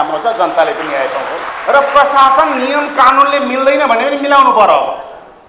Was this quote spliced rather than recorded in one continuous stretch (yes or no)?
yes